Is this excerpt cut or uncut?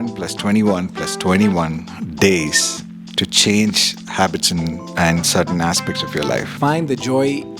cut